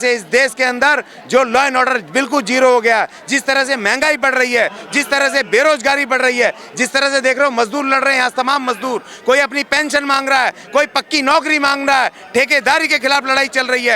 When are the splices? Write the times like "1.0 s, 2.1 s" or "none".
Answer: none